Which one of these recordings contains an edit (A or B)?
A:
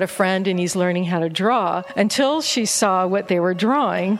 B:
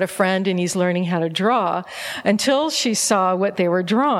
A